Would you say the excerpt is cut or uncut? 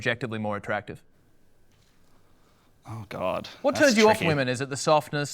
uncut